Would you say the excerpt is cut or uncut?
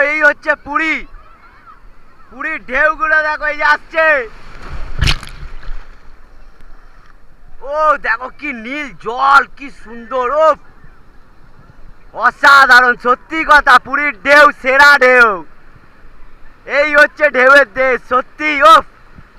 uncut